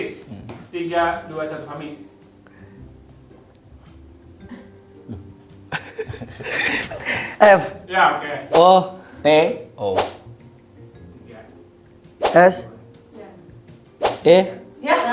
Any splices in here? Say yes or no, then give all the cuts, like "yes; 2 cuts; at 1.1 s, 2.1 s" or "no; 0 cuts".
no; 0 cuts